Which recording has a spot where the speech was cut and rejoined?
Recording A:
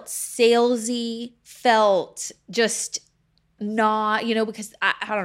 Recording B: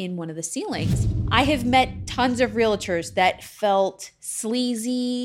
B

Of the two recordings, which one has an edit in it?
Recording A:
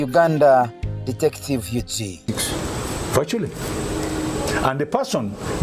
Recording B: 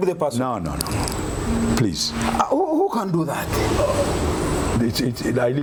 A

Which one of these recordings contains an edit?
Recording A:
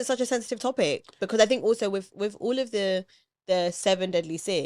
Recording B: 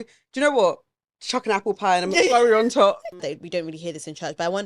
B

